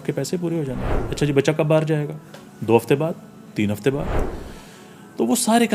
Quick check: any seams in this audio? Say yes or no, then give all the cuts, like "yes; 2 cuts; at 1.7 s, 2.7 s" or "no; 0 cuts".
no; 0 cuts